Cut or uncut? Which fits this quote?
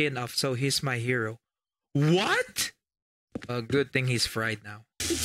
uncut